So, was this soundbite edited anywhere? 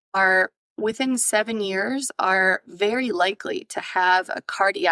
no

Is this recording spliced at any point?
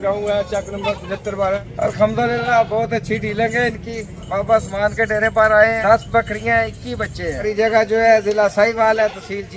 yes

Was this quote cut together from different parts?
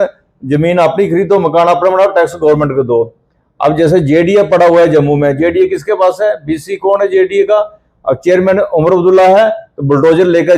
no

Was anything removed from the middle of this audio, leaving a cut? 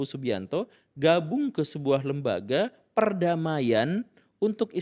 no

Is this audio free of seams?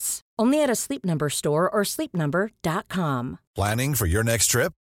no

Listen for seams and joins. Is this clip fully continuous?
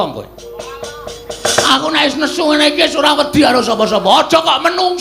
no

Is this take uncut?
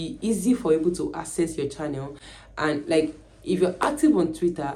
yes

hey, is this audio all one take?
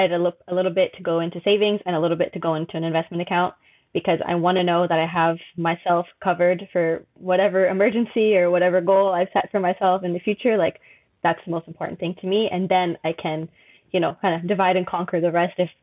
yes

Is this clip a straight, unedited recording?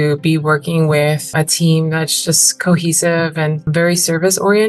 no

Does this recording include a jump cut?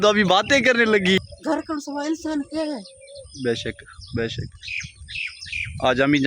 yes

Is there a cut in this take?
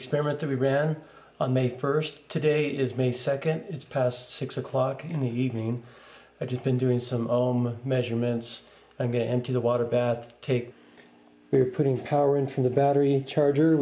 no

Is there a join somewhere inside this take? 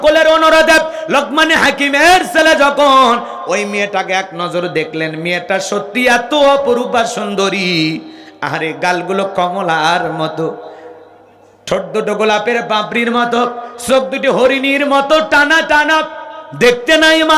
no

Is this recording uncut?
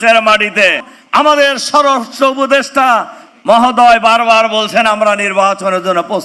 no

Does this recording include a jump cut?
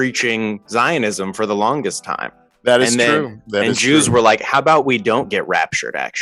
no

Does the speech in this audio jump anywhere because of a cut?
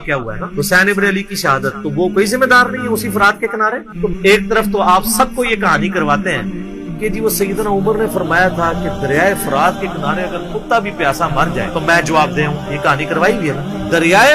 yes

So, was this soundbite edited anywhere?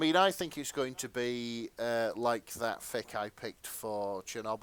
no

